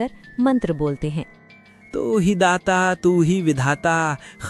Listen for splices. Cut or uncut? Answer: uncut